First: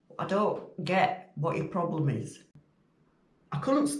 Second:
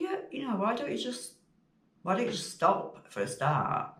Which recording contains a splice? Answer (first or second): first